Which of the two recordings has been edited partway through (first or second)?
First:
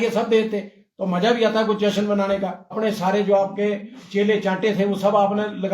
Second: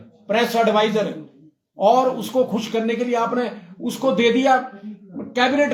first